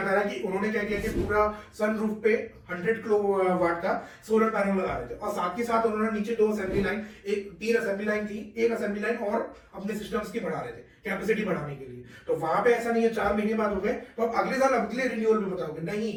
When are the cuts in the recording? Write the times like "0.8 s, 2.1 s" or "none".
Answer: none